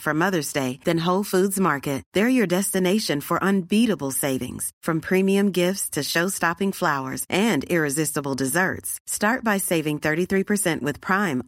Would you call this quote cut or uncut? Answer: uncut